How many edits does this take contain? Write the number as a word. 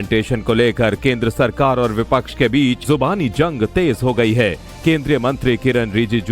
one